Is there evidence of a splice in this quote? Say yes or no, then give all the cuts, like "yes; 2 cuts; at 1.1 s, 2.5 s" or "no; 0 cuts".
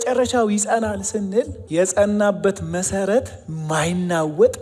yes; 1 cut; at 1.6 s